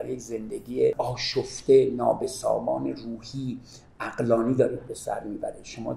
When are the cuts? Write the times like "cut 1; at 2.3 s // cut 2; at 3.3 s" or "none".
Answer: cut 1; at 0.9 s